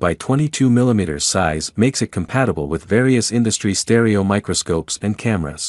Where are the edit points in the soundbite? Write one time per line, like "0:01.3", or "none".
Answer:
0:03.6